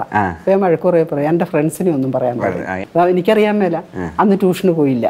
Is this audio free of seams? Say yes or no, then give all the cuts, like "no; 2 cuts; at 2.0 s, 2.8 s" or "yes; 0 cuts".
no; 1 cut; at 2.8 s